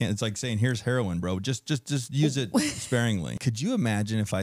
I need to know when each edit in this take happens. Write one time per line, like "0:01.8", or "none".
0:03.5

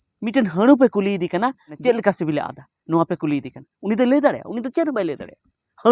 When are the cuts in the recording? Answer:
0:01.7

